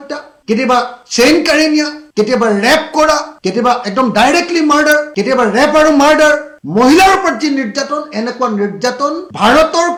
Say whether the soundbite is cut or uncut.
uncut